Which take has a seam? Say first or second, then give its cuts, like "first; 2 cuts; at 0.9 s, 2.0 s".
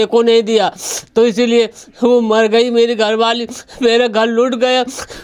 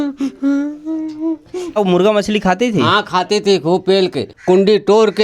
second; 2 cuts; at 1.8 s, 4.3 s